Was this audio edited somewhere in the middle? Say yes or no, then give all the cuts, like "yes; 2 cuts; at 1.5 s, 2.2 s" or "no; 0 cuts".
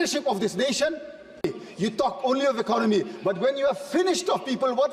yes; 1 cut; at 1.5 s